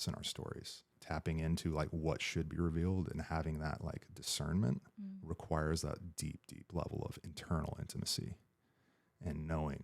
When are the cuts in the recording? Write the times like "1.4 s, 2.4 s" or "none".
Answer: 1.0 s